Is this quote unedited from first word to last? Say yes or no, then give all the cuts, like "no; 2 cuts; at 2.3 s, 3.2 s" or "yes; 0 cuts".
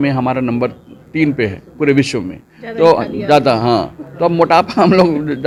yes; 0 cuts